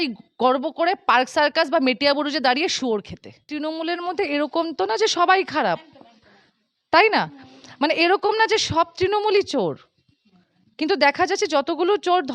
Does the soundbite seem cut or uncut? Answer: cut